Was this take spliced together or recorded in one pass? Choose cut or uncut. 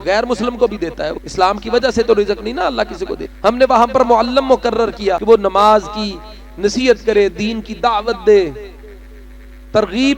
cut